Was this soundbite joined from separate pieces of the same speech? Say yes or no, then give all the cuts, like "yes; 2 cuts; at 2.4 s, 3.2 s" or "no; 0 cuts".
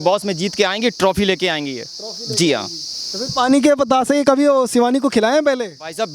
no; 0 cuts